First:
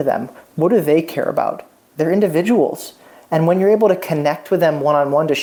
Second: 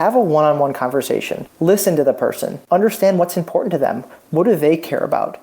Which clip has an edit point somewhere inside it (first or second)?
second